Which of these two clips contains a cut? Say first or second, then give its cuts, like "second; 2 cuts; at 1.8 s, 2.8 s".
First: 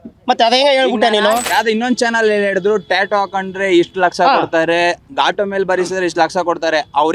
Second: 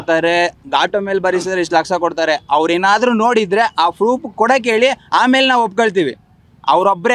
first; 1 cut; at 1.5 s